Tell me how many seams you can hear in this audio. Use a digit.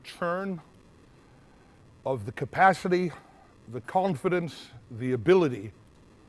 1